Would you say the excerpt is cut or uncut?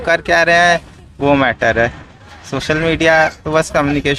uncut